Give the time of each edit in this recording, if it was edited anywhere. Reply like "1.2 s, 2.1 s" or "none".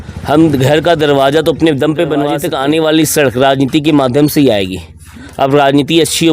2.4 s